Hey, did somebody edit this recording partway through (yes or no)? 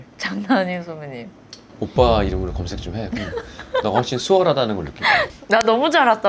yes